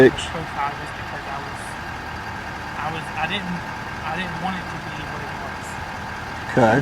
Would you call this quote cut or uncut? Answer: cut